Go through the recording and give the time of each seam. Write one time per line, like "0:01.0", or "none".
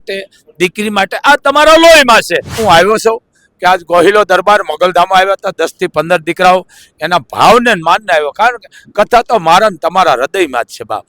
0:02.6